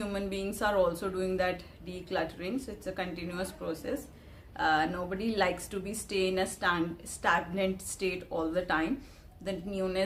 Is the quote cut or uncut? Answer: uncut